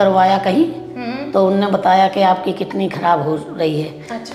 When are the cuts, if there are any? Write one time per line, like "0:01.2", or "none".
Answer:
none